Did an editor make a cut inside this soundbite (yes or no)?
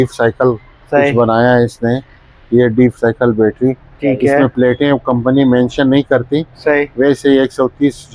no